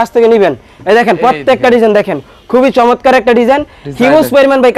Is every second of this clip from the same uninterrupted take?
yes; 0 cuts

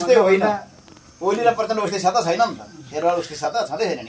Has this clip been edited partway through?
no; 0 cuts

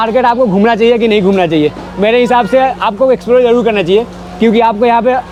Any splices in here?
no; 0 cuts

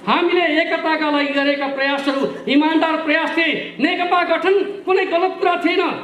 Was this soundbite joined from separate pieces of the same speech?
no; 0 cuts

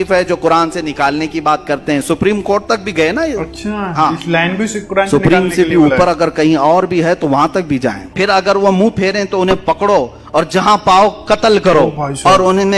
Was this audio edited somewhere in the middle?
yes; 1 cut; at 8.0 s

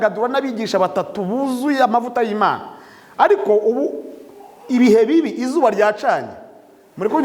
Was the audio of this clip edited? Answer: no; 0 cuts

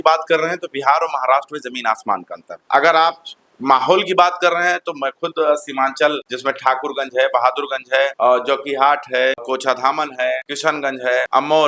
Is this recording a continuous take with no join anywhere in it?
yes; 0 cuts

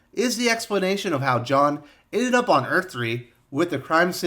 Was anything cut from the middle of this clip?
yes; 1 cut; at 3.3 s

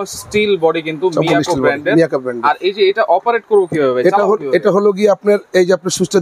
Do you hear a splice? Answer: no; 0 cuts

